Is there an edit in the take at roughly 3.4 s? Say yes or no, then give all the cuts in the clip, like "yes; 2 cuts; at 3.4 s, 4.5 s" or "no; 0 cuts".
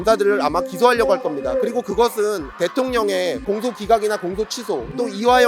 yes; 2 cuts; at 2.5 s, 3.4 s